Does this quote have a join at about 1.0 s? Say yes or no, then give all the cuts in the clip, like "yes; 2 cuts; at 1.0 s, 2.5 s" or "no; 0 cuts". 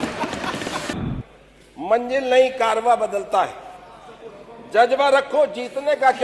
yes; 1 cut; at 1.0 s